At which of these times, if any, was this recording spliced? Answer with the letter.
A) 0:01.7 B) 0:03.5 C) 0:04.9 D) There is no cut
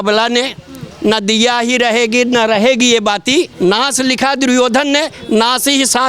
B